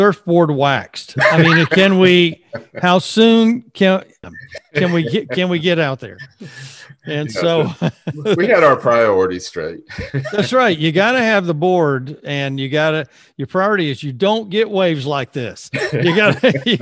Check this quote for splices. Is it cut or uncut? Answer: cut